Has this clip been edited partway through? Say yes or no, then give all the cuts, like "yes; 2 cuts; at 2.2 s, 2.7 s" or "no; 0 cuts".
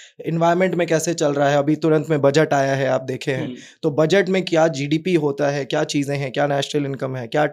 no; 0 cuts